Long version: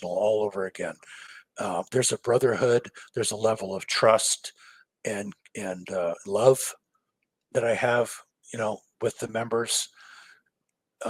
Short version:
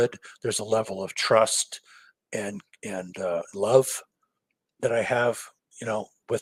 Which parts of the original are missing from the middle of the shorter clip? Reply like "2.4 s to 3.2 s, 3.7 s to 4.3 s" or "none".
none